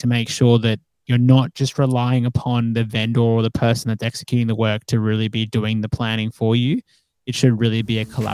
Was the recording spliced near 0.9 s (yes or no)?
yes